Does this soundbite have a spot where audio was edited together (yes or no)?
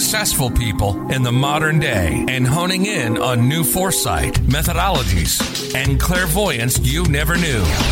no